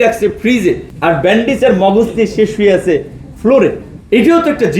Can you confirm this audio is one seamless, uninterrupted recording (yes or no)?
no